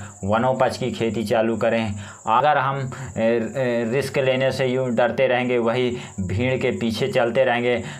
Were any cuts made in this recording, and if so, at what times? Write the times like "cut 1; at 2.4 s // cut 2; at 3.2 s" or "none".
cut 1; at 2.4 s